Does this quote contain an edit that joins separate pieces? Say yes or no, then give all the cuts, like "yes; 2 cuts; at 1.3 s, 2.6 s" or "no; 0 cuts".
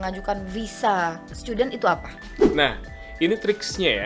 yes; 1 cut; at 2.5 s